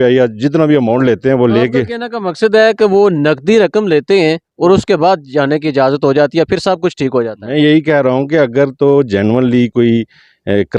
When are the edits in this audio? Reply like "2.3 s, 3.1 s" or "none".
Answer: none